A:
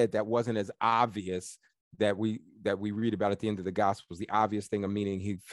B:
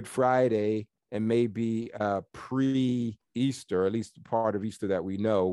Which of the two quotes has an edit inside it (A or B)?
B